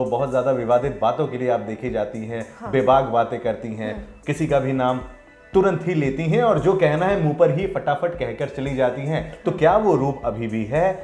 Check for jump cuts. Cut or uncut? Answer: uncut